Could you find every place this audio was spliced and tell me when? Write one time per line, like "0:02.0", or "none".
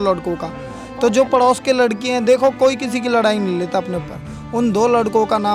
none